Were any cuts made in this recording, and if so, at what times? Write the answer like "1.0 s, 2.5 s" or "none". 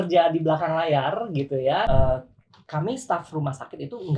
1.9 s